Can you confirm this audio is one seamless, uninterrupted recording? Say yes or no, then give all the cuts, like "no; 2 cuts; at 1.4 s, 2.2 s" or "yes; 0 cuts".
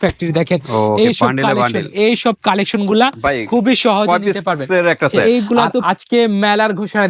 no; 1 cut; at 5.8 s